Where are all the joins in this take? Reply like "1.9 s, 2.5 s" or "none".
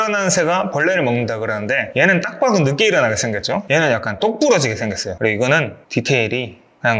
3.6 s, 5.1 s